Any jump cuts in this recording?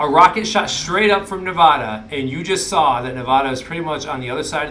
no; 0 cuts

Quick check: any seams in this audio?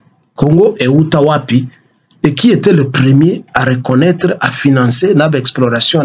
no; 0 cuts

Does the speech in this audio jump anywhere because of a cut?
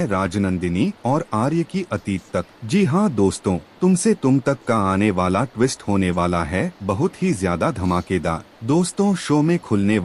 yes; 3 cuts; at 2.6 s, 3.7 s, 8.5 s

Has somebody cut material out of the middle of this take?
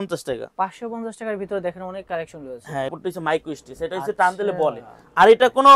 yes; 1 cut; at 2.9 s

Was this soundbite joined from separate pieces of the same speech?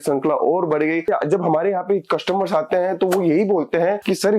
yes; 1 cut; at 1.1 s

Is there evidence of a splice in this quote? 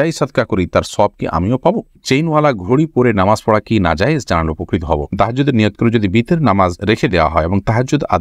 yes; 2 cuts; at 2.0 s, 5.1 s

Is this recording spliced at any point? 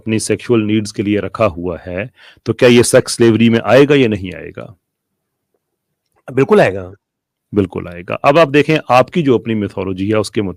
no; 0 cuts

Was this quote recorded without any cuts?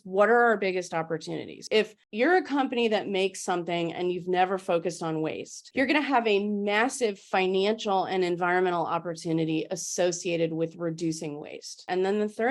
yes; 0 cuts

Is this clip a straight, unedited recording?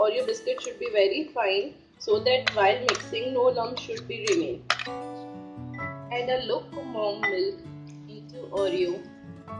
no; 2 cuts; at 4.8 s, 6.1 s

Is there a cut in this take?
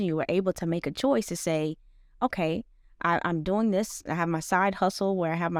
no; 0 cuts

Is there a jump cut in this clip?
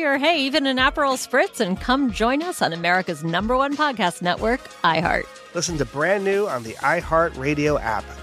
no; 0 cuts

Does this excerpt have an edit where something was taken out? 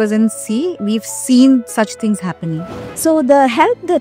yes; 1 cut; at 2.7 s

